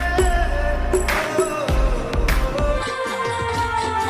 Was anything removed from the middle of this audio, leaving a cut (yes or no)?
yes